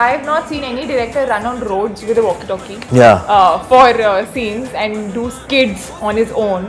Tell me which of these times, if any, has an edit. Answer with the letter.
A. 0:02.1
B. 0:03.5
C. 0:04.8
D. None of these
C